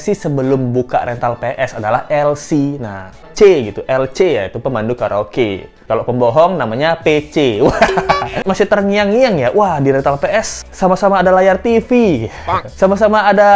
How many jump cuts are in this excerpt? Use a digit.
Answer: 2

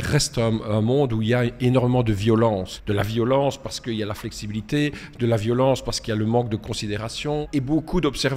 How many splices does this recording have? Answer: 2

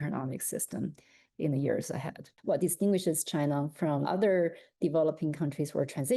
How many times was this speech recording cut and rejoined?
2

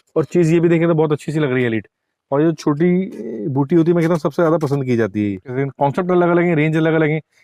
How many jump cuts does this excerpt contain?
1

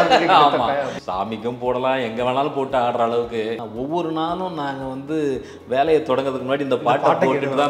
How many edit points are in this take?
2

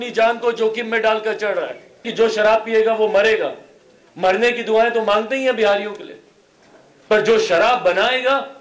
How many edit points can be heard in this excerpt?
1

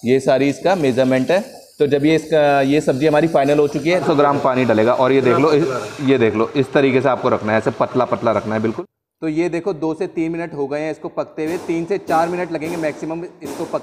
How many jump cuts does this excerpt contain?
2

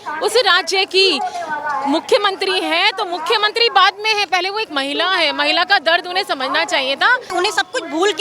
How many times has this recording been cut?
1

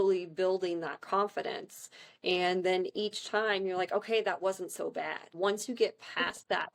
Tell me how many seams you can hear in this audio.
1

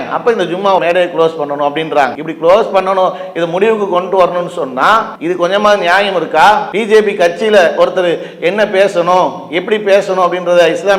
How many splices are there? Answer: 3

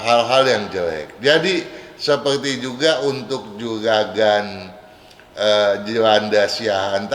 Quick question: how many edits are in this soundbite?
0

